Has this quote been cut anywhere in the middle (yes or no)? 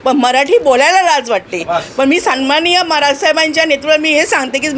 no